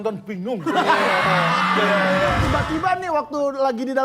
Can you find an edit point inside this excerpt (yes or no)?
yes